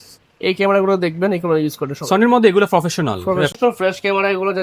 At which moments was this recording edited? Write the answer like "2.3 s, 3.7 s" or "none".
3.5 s

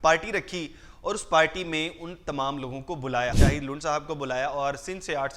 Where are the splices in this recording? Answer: 3.4 s

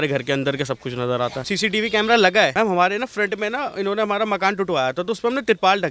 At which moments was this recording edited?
1.4 s, 2.5 s

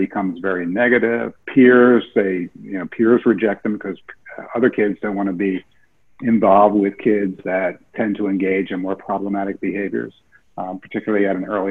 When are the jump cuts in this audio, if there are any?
1.4 s

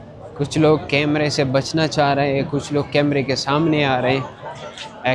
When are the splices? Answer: none

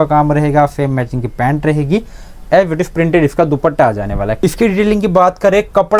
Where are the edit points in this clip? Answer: 4.3 s

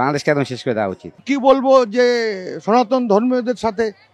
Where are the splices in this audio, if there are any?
1.2 s

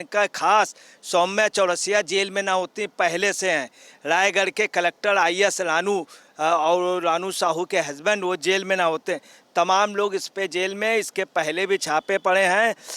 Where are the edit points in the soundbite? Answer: none

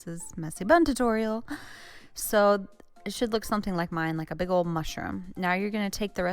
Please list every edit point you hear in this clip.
5.0 s

